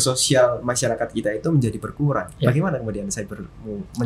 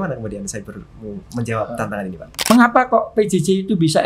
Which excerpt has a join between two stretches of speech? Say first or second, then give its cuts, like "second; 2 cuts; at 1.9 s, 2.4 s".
second; 1 cut; at 2.5 s